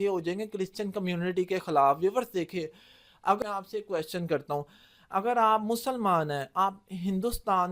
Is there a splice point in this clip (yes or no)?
yes